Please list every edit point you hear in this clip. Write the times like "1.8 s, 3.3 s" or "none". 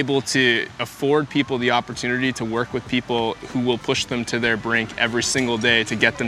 none